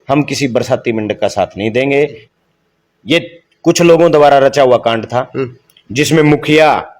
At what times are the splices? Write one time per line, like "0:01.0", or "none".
0:02.3